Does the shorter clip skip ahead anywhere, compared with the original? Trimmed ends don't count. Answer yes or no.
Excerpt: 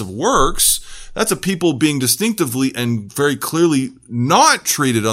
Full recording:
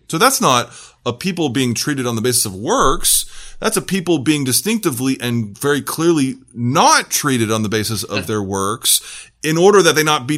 no